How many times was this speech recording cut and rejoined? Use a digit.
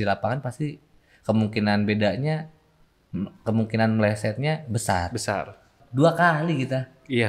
1